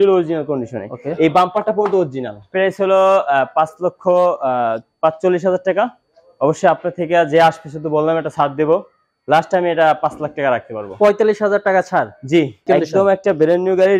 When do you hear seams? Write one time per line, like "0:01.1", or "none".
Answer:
0:02.5
0:12.6